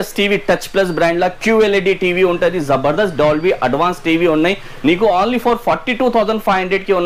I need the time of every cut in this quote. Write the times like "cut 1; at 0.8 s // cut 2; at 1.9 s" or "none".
none

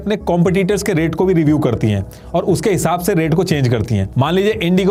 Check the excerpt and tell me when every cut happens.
none

